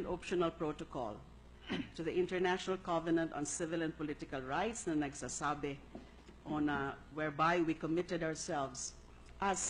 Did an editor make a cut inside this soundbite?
yes; 1 cut; at 7.0 s

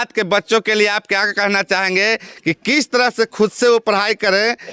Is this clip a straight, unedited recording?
yes; 0 cuts

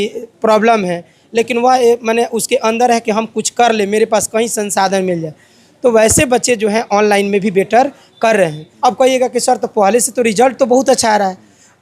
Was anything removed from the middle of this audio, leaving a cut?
yes; 1 cut; at 8.6 s

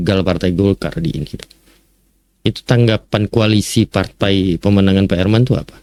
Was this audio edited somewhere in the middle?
no; 0 cuts

